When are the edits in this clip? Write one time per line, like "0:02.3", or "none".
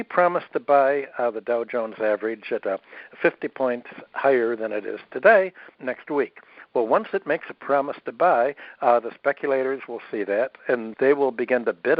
0:05.7
0:10.9

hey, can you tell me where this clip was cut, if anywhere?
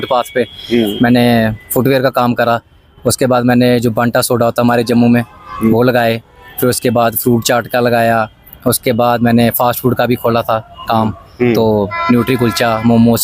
none

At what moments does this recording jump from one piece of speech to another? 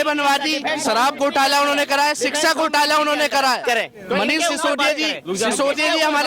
none

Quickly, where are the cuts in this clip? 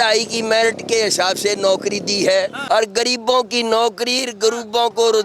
0:02.6

